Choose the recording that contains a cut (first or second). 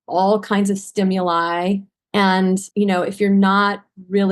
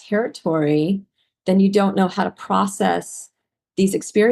first